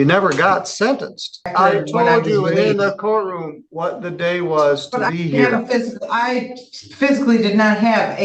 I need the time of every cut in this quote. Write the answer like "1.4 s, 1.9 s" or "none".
1.5 s